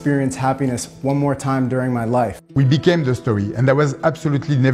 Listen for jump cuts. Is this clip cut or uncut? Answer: cut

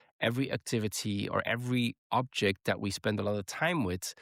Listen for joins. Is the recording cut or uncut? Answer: uncut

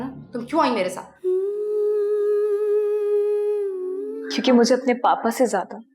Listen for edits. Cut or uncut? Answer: cut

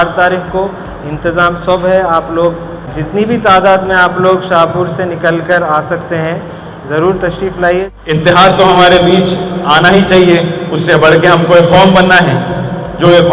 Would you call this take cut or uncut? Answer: cut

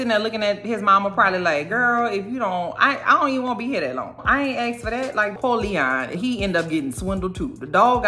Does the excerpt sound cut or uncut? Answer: cut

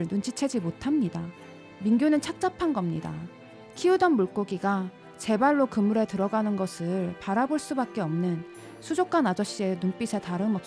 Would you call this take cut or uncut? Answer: cut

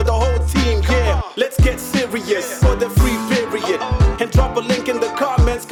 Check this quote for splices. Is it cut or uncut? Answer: uncut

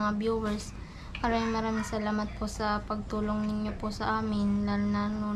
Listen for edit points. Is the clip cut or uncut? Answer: uncut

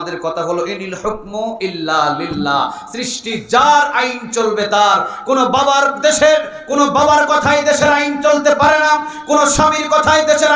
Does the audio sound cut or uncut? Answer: uncut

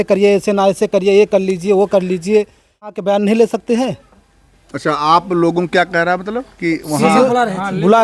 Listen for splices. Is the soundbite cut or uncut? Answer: cut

